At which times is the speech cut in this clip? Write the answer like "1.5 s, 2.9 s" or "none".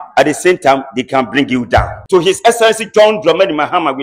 1.9 s